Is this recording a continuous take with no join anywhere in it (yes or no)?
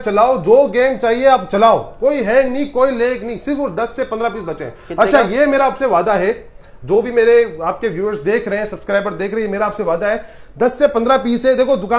yes